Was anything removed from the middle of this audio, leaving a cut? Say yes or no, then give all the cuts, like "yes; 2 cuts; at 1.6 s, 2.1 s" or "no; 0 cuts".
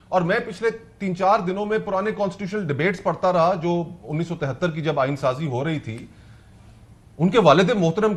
no; 0 cuts